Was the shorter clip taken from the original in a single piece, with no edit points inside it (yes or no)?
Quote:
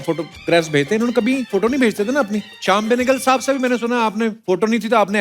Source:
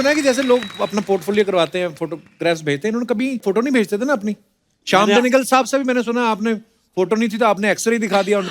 no